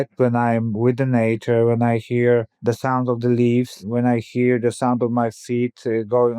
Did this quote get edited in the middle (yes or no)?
yes